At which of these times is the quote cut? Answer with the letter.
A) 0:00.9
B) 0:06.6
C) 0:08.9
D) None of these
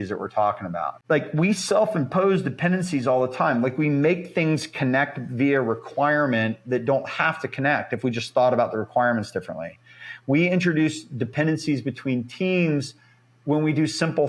A